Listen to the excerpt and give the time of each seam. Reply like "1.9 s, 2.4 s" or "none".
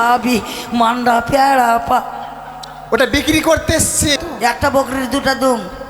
4.2 s